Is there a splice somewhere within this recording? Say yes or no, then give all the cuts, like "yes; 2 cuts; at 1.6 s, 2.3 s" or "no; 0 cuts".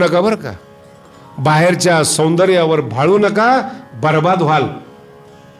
no; 0 cuts